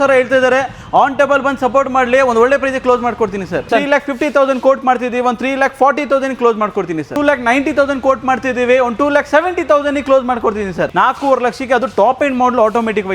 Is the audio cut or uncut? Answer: cut